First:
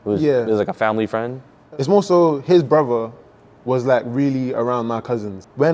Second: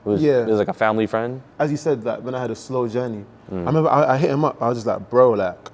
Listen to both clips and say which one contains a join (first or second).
second